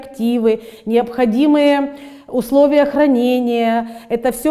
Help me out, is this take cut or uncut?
uncut